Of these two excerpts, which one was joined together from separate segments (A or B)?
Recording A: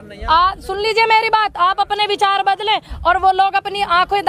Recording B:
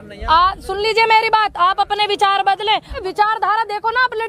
B